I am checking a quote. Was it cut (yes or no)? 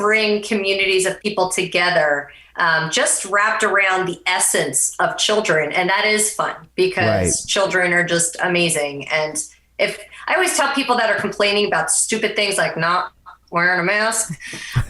yes